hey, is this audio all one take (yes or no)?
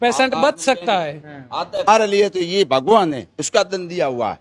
no